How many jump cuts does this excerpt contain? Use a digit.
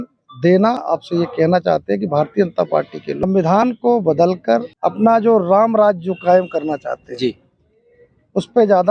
3